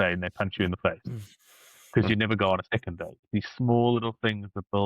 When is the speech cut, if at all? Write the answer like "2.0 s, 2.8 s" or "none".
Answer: 3.3 s